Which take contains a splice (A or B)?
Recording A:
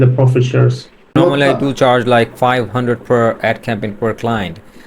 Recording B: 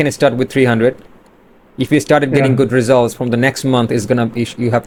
A